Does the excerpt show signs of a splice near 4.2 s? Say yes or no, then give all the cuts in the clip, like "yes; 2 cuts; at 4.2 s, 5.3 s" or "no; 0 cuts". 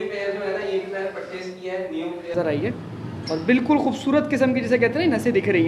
no; 1 cut; at 2.3 s